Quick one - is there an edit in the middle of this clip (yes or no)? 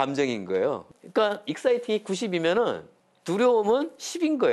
no